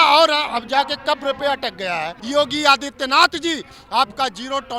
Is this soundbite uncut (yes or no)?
no